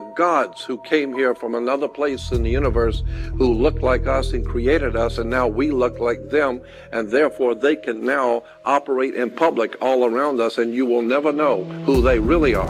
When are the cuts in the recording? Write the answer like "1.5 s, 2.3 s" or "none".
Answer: none